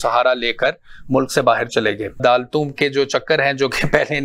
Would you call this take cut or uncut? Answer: cut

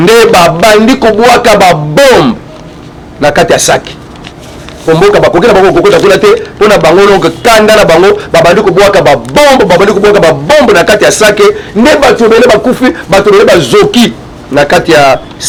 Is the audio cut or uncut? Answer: uncut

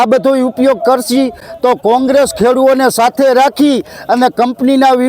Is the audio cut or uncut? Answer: uncut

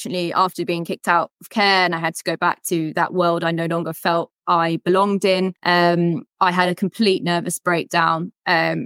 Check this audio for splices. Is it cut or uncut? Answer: cut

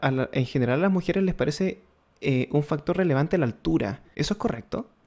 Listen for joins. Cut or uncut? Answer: cut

